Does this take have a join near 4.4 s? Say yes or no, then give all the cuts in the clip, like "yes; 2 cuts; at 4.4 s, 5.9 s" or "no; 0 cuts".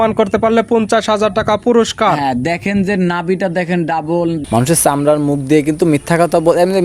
yes; 1 cut; at 4.4 s